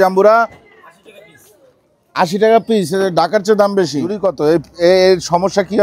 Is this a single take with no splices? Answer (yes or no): no